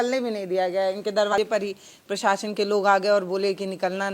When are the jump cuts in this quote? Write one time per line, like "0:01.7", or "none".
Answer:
0:01.3

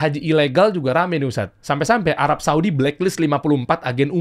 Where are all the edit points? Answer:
none

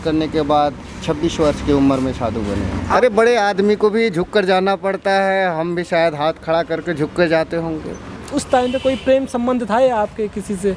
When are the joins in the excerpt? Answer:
0:02.8
0:08.3

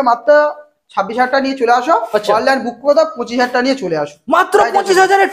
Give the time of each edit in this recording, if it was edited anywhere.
none

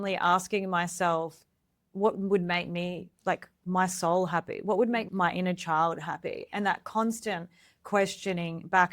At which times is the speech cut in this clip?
0:01.8
0:05.1

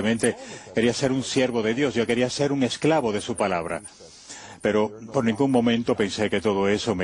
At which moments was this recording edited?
0:03.5

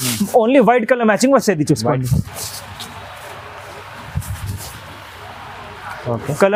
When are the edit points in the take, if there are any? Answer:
none

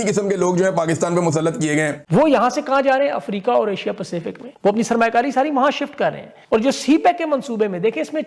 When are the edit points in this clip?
0:02.0

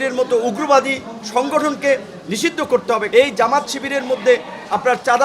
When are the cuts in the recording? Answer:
0:03.0

